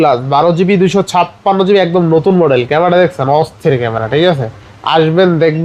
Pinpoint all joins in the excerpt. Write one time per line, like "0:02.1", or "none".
none